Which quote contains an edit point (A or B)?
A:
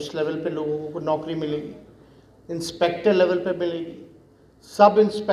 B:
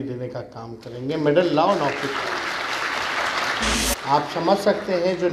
B